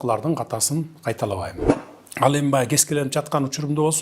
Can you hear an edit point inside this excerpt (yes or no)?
yes